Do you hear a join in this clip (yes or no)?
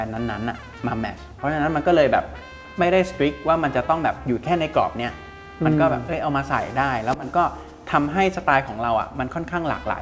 no